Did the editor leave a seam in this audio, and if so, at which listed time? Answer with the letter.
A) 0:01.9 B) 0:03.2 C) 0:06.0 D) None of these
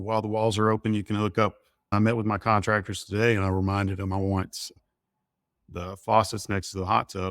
A